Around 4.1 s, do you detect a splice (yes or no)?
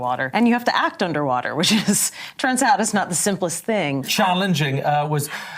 yes